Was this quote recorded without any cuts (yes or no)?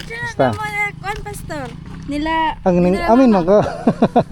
yes